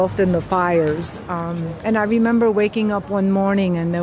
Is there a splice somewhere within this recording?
no; 0 cuts

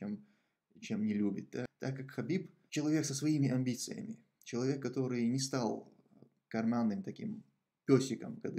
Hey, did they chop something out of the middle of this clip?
yes; 2 cuts; at 1.7 s, 2.6 s

